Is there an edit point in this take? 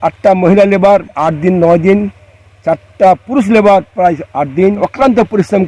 yes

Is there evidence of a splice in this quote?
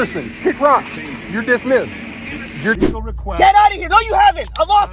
yes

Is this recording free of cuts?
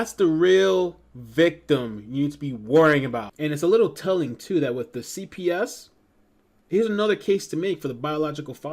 no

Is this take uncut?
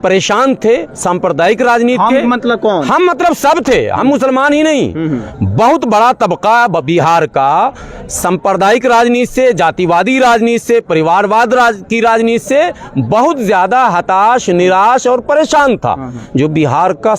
no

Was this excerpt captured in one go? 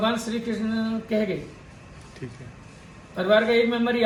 yes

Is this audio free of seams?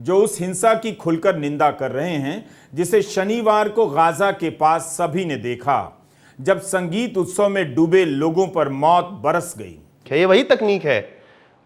no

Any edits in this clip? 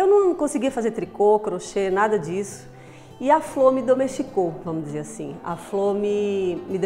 no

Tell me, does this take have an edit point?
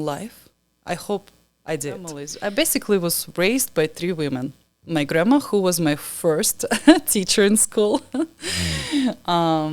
yes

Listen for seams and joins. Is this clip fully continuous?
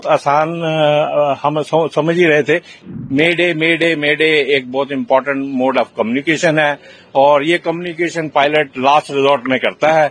no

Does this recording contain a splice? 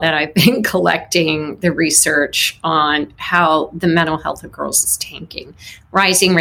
no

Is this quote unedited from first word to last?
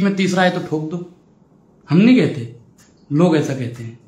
yes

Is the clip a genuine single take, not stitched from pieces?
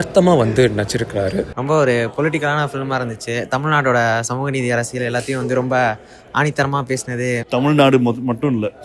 no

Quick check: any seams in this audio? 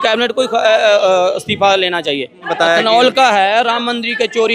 yes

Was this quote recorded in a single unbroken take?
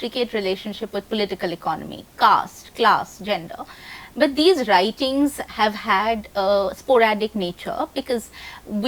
yes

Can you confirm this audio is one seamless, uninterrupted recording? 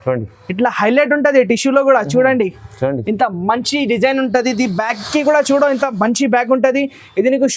yes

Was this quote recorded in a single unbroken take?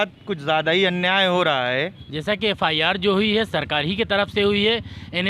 no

